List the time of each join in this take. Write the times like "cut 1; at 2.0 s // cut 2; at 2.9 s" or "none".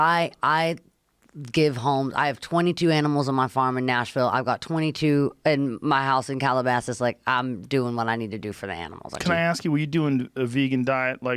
cut 1; at 9.2 s